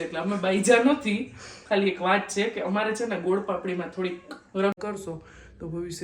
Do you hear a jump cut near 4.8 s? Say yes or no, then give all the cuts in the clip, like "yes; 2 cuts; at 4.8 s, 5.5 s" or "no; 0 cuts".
yes; 1 cut; at 4.8 s